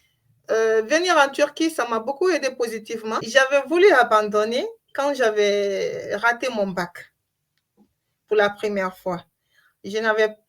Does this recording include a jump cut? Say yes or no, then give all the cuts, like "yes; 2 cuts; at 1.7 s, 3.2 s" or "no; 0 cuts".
yes; 1 cut; at 3.3 s